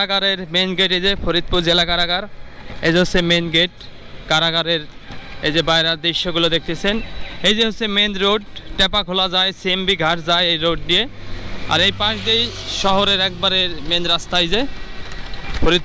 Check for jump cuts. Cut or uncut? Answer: uncut